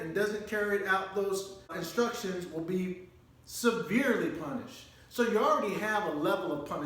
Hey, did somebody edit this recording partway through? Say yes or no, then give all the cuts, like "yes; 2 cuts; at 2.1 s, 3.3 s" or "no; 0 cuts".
yes; 1 cut; at 1.8 s